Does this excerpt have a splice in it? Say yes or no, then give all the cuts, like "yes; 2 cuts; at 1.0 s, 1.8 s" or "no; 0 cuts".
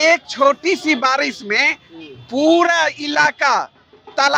no; 0 cuts